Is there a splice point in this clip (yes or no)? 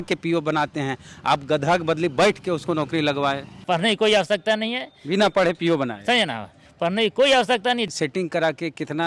yes